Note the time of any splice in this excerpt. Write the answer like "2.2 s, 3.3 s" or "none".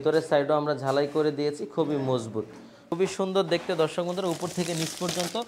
2.9 s